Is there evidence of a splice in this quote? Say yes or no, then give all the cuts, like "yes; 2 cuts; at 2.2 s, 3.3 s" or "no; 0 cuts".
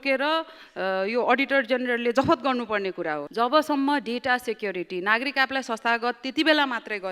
yes; 1 cut; at 3.2 s